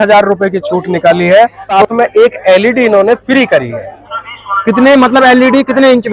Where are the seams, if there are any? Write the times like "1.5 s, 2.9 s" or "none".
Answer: 1.6 s